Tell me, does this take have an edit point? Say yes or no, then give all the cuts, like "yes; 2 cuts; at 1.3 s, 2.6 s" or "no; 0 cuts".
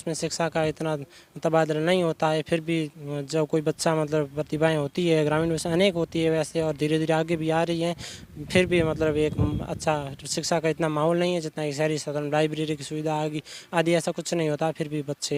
no; 0 cuts